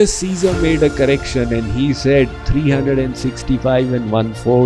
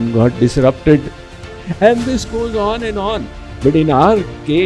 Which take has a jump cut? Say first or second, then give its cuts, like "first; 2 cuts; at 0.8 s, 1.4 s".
second; 2 cuts; at 1.2 s, 3.4 s